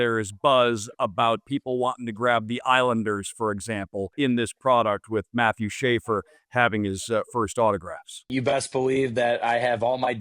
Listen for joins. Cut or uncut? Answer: cut